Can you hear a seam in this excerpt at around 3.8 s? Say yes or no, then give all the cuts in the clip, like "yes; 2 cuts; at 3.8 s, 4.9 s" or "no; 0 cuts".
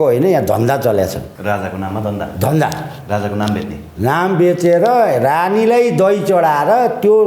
no; 1 cut; at 1.3 s